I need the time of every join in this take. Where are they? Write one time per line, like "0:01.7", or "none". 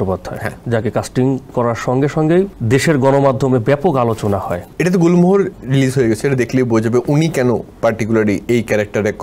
0:02.6
0:04.6
0:05.5